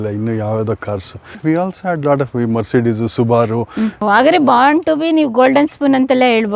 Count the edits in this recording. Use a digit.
2